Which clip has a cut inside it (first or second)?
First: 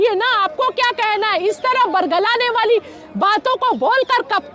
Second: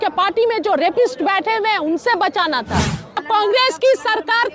second